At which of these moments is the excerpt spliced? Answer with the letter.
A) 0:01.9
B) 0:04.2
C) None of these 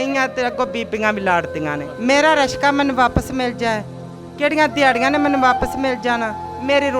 A